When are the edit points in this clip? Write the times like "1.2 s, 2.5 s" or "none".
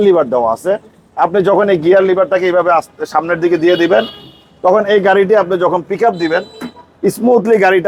none